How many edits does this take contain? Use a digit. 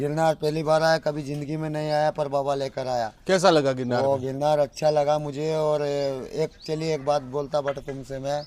0